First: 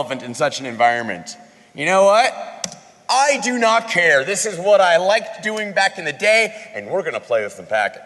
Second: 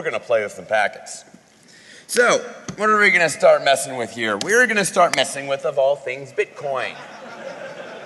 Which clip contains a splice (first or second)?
first